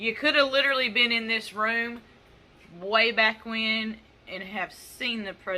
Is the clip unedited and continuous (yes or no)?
yes